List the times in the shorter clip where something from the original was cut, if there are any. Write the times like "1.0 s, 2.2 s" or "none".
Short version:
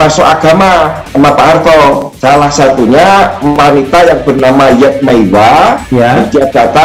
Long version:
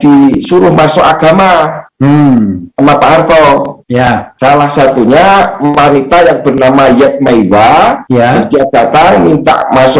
1.0 s, 2.1 s